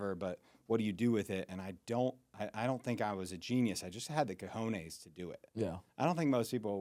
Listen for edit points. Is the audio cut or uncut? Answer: uncut